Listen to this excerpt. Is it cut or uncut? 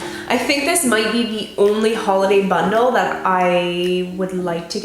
uncut